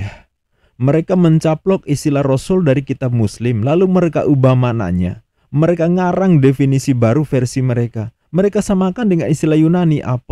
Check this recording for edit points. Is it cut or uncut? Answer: uncut